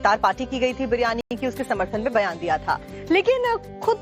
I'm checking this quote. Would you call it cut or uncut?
uncut